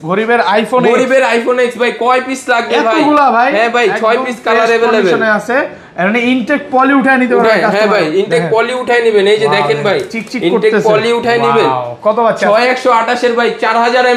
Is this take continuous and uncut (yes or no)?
yes